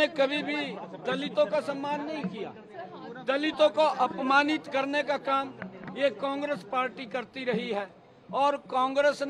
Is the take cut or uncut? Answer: uncut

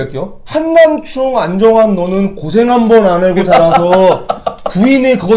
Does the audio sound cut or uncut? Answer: uncut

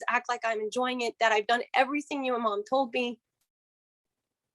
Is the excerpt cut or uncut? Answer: uncut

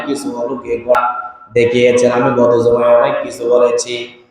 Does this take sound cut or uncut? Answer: cut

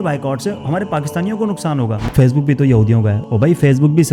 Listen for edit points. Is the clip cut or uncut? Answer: cut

